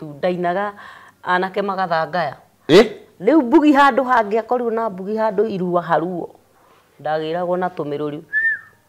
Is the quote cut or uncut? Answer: uncut